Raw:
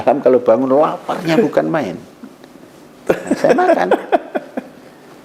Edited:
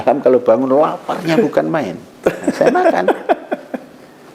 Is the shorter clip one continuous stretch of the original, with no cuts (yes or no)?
no